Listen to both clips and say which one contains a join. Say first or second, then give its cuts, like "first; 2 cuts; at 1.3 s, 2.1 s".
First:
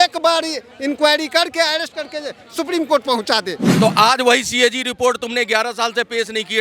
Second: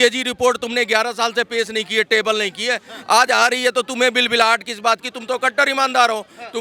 first; 1 cut; at 3.6 s